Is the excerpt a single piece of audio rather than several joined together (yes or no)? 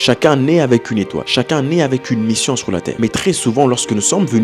no